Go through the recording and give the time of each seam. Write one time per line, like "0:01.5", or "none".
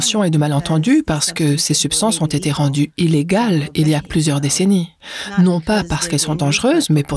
none